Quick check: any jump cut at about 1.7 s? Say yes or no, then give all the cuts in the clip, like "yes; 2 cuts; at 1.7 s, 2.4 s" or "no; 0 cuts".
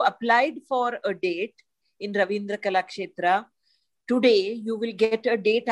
no; 0 cuts